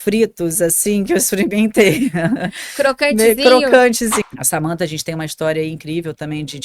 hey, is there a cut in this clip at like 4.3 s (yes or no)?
yes